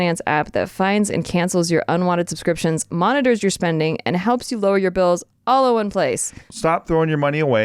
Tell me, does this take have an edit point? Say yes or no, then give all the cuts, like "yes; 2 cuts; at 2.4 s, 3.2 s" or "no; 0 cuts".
yes; 1 cut; at 6.4 s